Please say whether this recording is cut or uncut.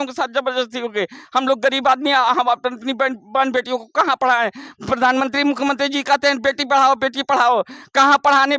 uncut